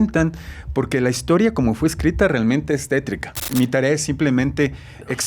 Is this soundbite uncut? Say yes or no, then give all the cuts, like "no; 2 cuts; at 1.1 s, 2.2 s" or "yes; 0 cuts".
no; 1 cut; at 3.4 s